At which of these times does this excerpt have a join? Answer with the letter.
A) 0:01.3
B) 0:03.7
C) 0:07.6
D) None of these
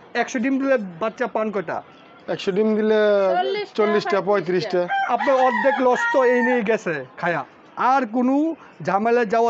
C